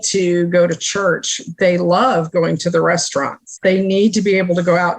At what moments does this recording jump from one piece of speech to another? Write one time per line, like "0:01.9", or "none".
0:03.4